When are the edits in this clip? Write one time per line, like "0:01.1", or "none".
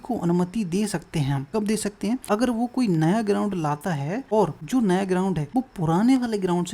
0:01.4
0:02.2
0:04.5
0:05.4